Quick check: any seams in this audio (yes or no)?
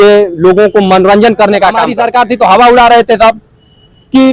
yes